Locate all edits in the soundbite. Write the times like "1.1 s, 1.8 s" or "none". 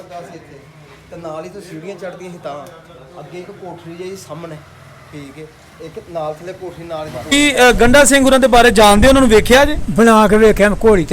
7.3 s